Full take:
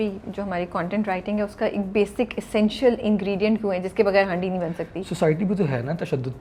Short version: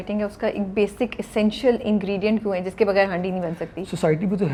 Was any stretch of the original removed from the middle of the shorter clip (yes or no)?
no